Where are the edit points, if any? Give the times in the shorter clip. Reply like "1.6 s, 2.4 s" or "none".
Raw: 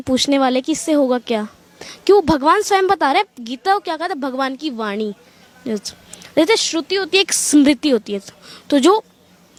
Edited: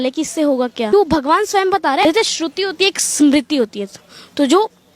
0.9 s, 2.0 s